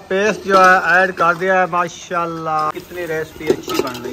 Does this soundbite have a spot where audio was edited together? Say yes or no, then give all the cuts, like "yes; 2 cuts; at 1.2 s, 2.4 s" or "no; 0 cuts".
yes; 1 cut; at 2.7 s